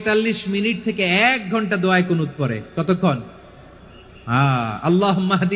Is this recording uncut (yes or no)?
yes